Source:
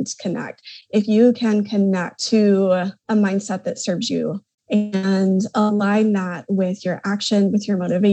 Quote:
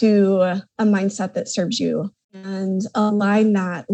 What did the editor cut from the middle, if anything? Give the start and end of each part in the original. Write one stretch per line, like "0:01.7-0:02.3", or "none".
0:04.7-0:05.0